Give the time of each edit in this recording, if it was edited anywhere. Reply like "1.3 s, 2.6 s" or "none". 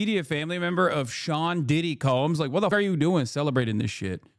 2.7 s